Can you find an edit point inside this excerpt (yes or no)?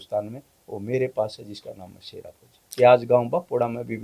yes